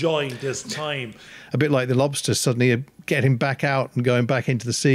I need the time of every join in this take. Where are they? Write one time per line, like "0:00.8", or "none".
0:01.3